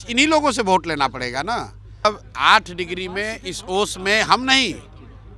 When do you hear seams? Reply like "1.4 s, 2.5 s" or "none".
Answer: 2.0 s